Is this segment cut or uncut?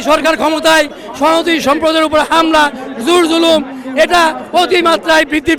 uncut